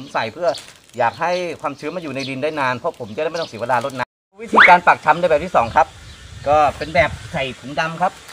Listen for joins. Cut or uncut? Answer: cut